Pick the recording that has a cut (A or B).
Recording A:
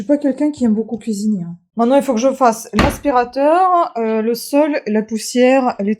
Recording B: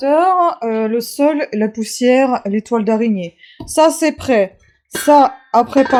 A